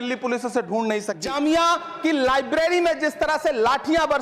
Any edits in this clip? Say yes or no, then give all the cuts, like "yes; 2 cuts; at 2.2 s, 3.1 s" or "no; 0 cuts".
yes; 1 cut; at 1.2 s